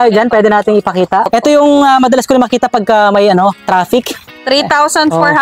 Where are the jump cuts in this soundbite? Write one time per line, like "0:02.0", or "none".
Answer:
0:01.3
0:04.3